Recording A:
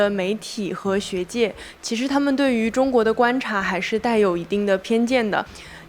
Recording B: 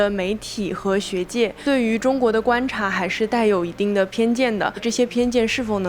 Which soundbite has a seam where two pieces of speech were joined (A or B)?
B